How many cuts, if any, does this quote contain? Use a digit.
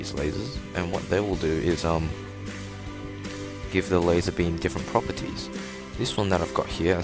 1